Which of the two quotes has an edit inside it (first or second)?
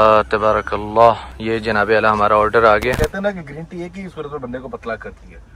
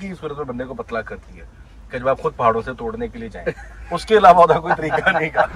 first